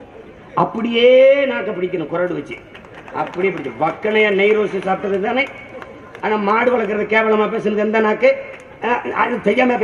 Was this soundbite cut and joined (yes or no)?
no